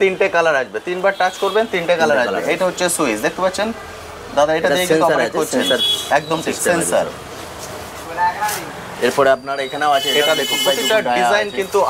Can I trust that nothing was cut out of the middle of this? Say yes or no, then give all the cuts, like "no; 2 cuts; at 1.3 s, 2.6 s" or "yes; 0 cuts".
yes; 0 cuts